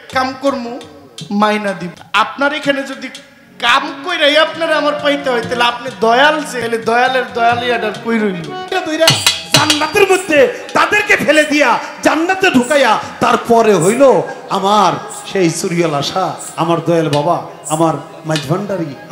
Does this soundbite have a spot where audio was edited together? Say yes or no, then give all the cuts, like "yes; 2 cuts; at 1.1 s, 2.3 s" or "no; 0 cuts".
yes; 3 cuts; at 1.9 s, 6.5 s, 8.7 s